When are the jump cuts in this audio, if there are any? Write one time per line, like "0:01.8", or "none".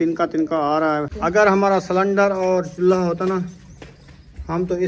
0:01.1